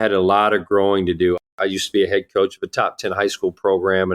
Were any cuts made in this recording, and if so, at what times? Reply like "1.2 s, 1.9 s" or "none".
1.4 s